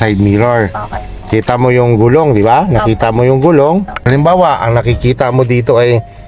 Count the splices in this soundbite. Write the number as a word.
one